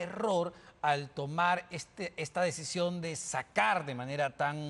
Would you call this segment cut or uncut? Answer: uncut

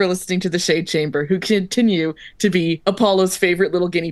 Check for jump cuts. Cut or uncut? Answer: cut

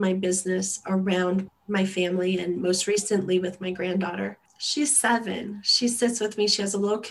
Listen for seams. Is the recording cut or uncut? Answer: cut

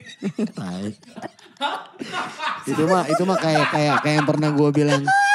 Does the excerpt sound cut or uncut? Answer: uncut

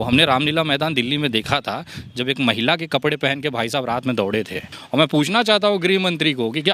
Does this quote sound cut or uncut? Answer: cut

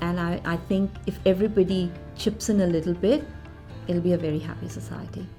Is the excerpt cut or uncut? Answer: uncut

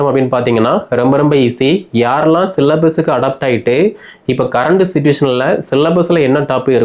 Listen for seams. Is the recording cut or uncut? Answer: uncut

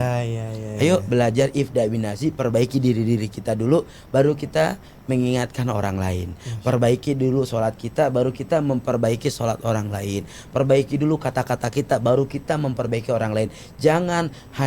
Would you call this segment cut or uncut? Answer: uncut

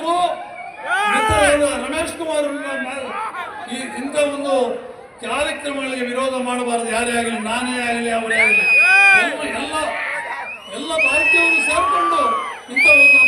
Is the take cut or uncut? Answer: cut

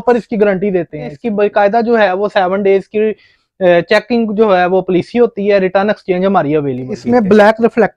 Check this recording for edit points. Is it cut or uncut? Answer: cut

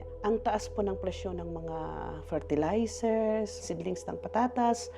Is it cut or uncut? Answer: cut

